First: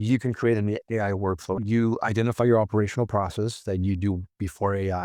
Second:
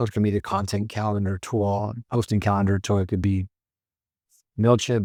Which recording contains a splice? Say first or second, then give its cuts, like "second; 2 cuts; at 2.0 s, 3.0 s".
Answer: first; 1 cut; at 1.6 s